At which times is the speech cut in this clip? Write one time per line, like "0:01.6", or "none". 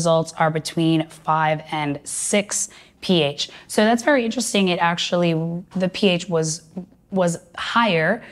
none

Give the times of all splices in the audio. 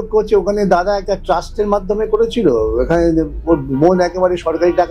none

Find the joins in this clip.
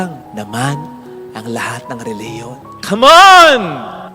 none

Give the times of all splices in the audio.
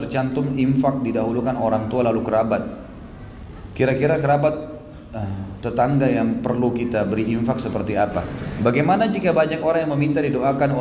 0:08.4

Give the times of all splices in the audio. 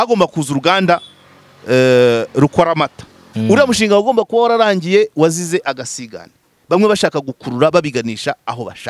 0:03.3

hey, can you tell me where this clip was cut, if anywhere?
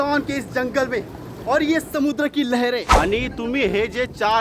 0:02.9

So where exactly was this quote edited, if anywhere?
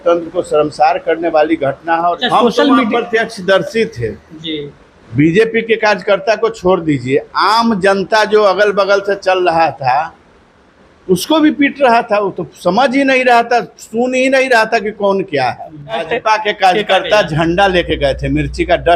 0:02.2
0:16.1

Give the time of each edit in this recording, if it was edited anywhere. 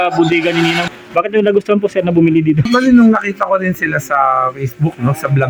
0:00.8
0:02.7

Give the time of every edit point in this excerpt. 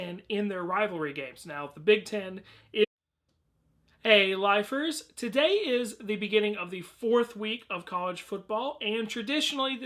none

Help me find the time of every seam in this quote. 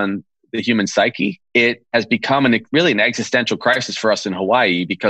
0:01.7
0:02.6

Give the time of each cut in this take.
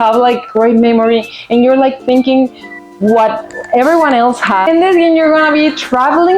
0:04.6

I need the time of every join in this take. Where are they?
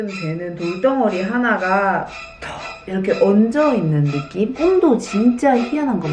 none

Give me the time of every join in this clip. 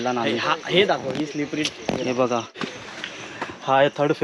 0:02.5

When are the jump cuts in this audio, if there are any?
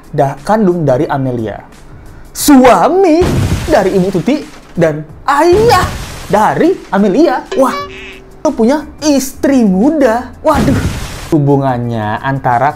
0:08.5
0:11.3

